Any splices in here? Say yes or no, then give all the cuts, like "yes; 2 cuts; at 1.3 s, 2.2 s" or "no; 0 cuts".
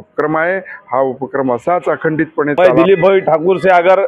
yes; 1 cut; at 2.6 s